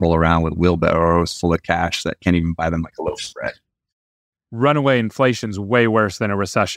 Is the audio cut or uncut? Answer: cut